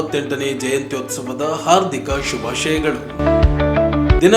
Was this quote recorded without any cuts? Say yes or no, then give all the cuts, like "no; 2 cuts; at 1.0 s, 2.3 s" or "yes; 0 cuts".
yes; 0 cuts